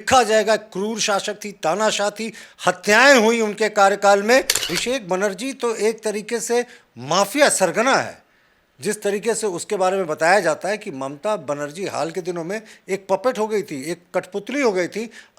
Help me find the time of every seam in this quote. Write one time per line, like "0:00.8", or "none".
0:04.7